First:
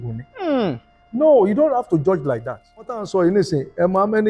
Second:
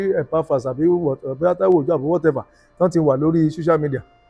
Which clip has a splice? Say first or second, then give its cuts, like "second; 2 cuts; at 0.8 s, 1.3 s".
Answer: first; 1 cut; at 3.0 s